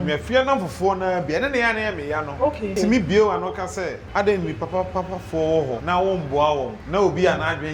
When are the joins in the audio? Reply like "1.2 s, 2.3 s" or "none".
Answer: 2.7 s, 4.0 s, 5.8 s, 6.8 s